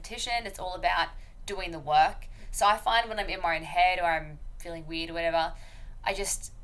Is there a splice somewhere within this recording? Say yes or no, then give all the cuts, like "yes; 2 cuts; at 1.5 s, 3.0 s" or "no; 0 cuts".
no; 0 cuts